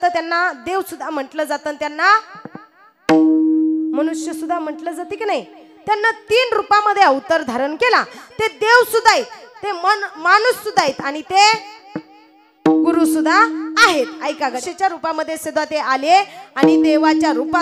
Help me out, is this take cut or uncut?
cut